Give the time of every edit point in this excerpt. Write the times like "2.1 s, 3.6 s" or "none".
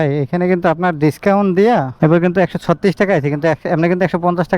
none